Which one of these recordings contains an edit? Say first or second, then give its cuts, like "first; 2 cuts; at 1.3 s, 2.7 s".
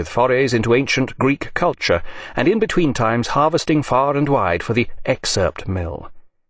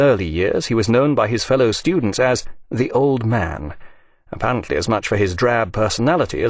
first; 1 cut; at 5.2 s